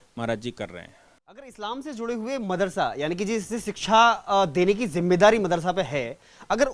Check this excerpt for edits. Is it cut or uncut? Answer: uncut